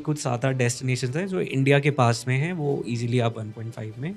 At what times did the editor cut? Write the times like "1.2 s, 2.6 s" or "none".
none